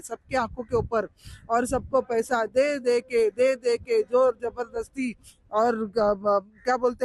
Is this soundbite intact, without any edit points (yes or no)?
yes